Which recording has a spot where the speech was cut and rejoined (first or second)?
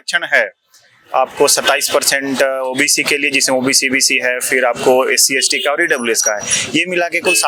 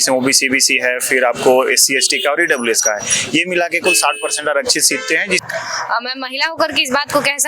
second